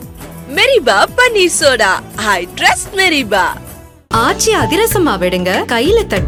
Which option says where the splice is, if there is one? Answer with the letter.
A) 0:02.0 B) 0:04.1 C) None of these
C